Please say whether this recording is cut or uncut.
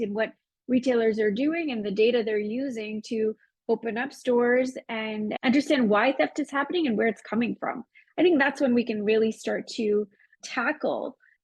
uncut